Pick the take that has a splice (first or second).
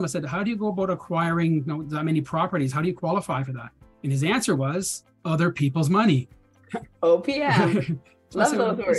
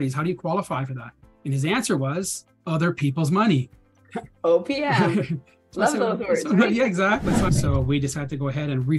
second